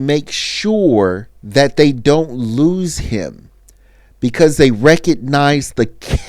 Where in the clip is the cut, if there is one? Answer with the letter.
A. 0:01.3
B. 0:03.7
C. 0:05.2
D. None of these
A